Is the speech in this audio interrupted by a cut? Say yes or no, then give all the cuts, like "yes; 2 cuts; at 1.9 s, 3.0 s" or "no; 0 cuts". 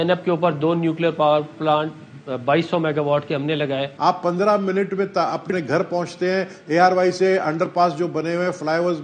yes; 1 cut; at 3.9 s